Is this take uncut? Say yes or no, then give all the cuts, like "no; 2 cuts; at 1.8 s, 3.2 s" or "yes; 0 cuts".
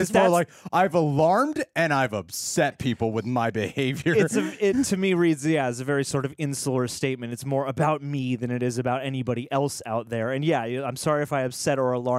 yes; 0 cuts